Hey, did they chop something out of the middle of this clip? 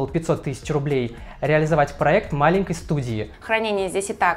yes; 1 cut; at 3.3 s

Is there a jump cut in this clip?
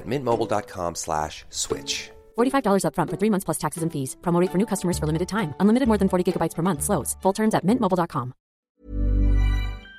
yes; 1 cut; at 8.5 s

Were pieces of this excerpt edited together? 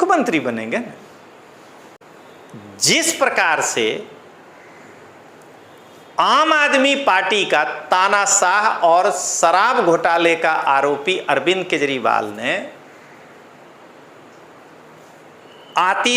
yes; 1 cut; at 2.0 s

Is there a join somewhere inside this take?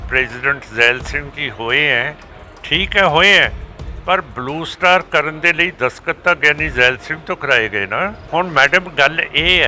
yes; 1 cut; at 8.2 s

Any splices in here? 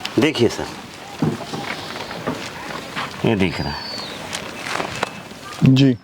no; 0 cuts

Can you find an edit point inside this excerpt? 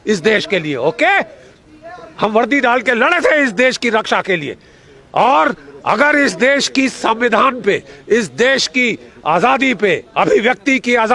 no; 0 cuts

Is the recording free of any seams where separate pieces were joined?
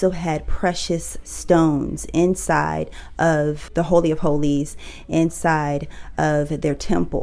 yes; 0 cuts

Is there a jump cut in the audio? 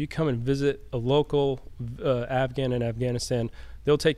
no; 0 cuts

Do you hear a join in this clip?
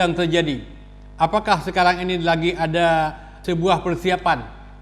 yes; 1 cut; at 3.3 s

